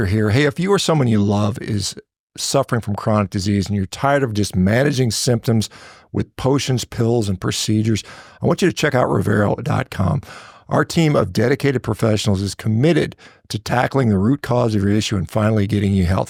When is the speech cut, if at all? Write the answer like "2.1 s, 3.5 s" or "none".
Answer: none